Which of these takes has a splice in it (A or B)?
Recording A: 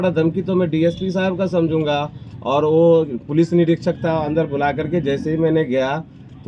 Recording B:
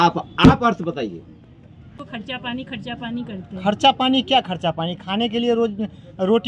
B